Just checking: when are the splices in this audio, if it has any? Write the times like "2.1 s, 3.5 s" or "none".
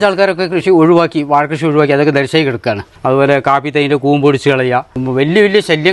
2.9 s, 5.0 s